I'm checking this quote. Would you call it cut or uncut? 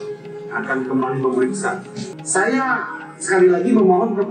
cut